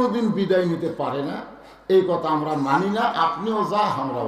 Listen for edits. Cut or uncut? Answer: uncut